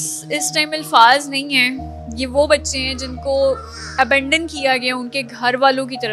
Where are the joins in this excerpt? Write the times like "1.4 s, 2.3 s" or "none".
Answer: none